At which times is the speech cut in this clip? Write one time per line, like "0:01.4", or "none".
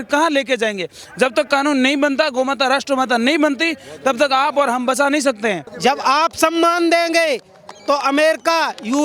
0:05.7